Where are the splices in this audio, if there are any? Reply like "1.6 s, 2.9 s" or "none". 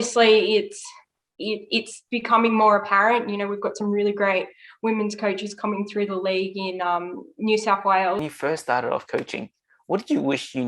8.2 s